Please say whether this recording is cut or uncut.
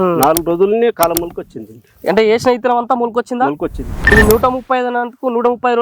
cut